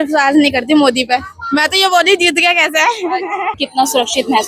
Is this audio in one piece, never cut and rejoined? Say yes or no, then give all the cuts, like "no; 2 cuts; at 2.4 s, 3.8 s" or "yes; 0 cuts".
yes; 0 cuts